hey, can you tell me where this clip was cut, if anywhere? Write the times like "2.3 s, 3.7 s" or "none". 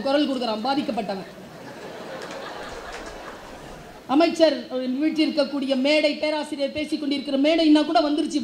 3.9 s